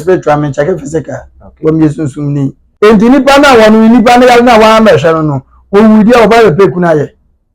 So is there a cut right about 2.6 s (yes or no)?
yes